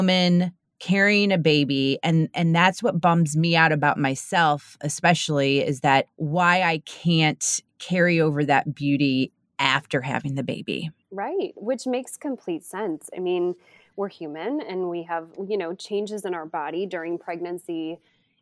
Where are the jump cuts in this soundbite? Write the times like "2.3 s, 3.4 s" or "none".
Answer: 6.2 s, 11.0 s